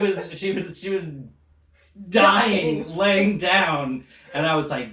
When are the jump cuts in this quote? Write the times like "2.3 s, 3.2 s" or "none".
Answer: none